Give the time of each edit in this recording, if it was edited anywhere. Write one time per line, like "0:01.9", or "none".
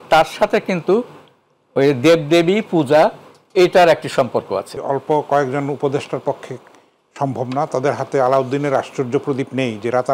0:04.8